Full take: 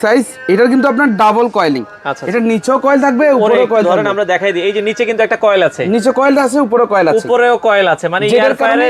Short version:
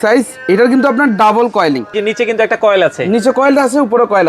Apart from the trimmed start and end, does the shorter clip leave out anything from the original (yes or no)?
yes